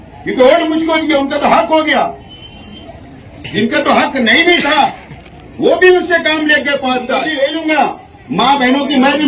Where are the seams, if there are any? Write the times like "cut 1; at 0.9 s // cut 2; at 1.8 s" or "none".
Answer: cut 1; at 7.3 s